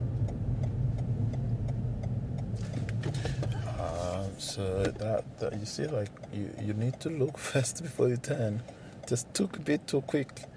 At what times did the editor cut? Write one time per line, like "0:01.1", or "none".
none